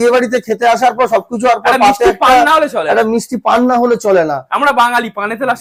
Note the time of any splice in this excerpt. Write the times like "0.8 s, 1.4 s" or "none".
none